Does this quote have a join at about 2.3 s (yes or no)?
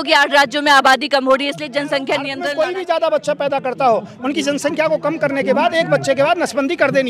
yes